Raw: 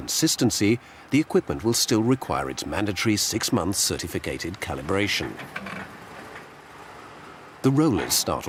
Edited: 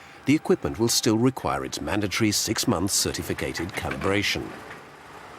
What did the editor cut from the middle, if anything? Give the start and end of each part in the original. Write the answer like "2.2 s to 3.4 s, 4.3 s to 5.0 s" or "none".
5.4 s to 6.2 s